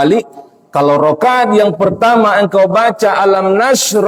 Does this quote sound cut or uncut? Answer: uncut